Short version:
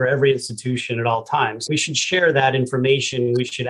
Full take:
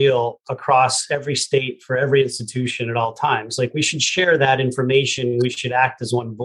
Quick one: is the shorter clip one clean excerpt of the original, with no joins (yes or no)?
no